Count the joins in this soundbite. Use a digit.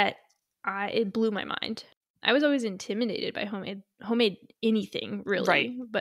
1